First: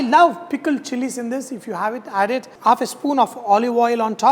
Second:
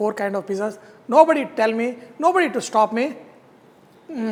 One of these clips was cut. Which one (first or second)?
first